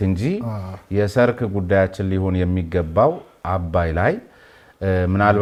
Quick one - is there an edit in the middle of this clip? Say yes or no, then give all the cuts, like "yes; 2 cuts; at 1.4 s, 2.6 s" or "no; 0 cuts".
no; 0 cuts